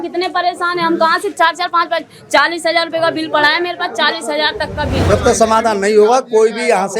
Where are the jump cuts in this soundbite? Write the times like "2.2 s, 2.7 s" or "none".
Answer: 5.0 s